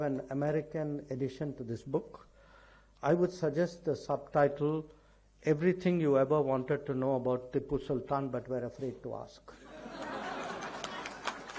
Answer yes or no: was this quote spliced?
no